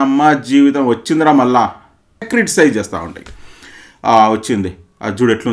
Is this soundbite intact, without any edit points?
no; 1 cut; at 2.3 s

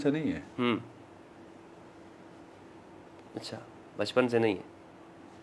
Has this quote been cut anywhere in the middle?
no; 0 cuts

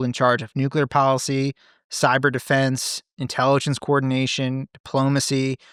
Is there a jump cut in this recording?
no; 0 cuts

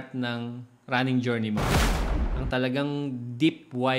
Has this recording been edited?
yes; 1 cut; at 1.9 s

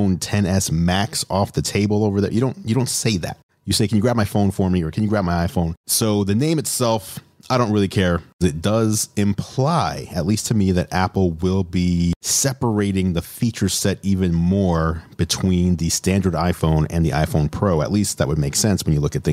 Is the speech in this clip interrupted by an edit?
yes; 1 cut; at 8.4 s

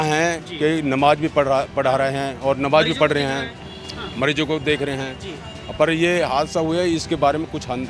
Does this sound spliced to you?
no; 0 cuts

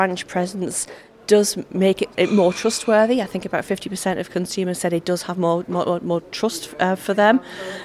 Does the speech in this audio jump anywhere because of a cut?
yes; 1 cut; at 2.1 s

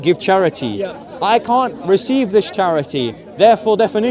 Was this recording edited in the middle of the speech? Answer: no; 0 cuts

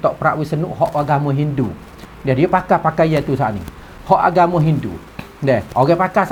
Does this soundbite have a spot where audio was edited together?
no; 0 cuts

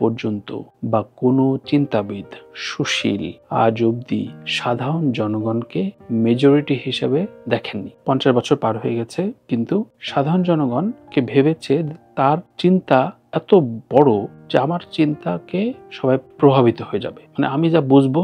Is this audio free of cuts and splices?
yes; 0 cuts

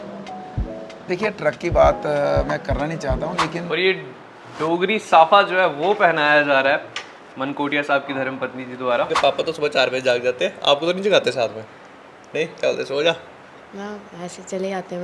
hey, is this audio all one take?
no; 2 cuts; at 3.6 s, 9.1 s

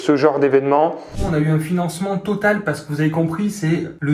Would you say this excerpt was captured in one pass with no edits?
no; 1 cut; at 1.2 s

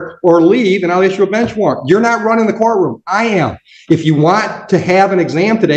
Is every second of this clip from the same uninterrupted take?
yes; 0 cuts

